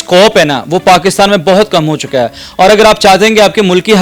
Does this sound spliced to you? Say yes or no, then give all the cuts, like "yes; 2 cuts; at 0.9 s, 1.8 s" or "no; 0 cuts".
no; 0 cuts